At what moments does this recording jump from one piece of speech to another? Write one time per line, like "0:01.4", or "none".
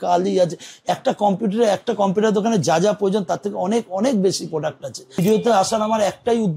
0:05.2